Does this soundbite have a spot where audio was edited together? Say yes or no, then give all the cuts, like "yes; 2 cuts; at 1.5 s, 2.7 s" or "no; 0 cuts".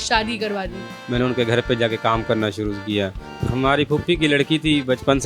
yes; 2 cuts; at 1.0 s, 3.2 s